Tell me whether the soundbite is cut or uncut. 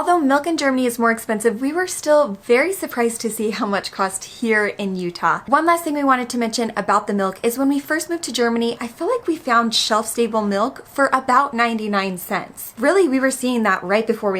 uncut